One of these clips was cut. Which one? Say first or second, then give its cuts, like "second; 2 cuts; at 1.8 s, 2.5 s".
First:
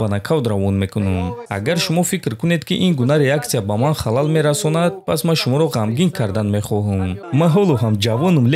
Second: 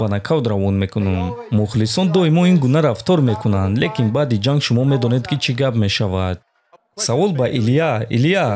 first; 2 cuts; at 1.4 s, 7.2 s